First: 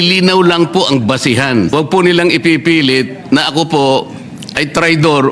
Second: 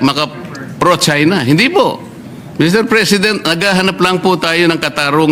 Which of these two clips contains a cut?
first; 1 cut; at 1.7 s

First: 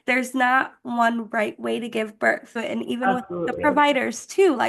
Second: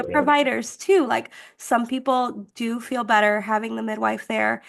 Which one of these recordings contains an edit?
first; 1 cut; at 2.6 s

